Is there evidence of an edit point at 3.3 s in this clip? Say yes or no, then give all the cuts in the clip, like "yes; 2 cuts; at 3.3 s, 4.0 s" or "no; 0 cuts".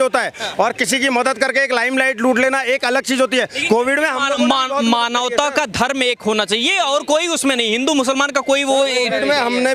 no; 0 cuts